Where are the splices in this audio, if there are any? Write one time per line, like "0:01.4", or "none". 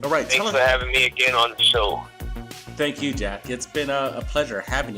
0:04.0